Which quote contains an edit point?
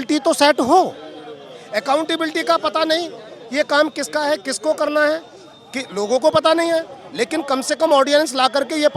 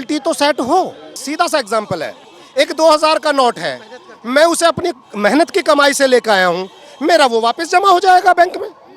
second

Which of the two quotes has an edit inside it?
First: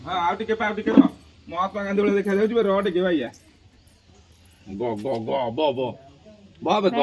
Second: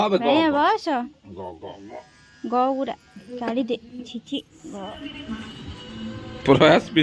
second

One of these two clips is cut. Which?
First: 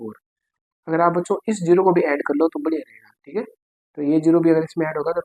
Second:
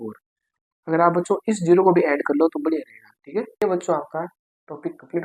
second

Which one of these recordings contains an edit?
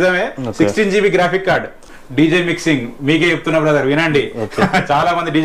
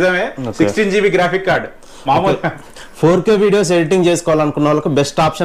first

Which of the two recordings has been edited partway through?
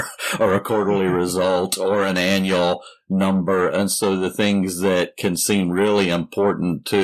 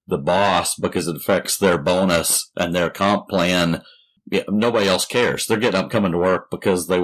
second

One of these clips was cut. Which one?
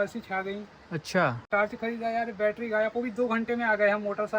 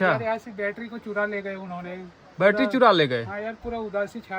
first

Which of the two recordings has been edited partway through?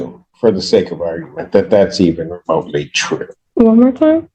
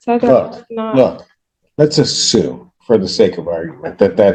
first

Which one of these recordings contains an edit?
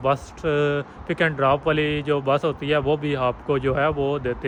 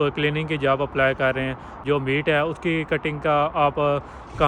second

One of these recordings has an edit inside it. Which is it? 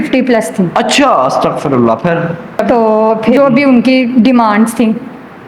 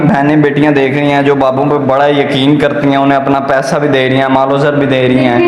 first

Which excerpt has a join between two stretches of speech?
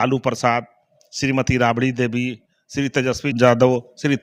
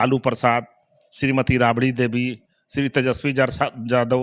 first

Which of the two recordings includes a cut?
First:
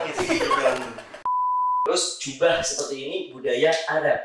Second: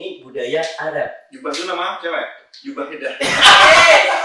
first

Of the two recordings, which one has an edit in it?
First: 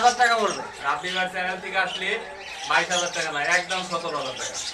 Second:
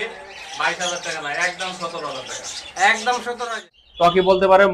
second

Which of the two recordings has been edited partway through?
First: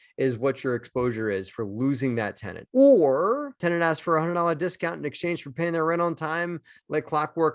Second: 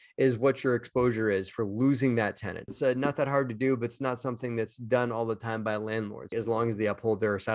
second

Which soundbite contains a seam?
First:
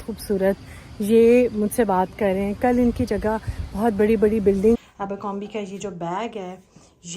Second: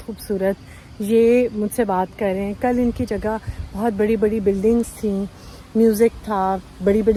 first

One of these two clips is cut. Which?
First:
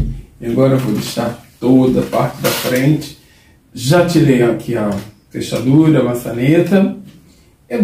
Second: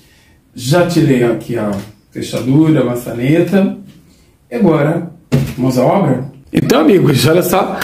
second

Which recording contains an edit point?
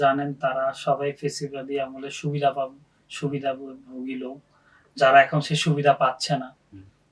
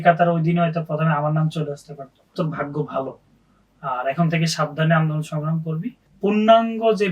second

